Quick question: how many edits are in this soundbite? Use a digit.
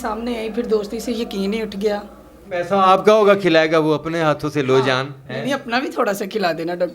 1